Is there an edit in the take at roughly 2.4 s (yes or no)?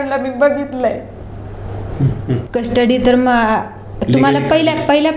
yes